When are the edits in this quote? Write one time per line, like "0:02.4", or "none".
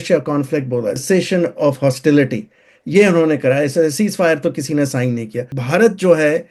0:01.0
0:05.5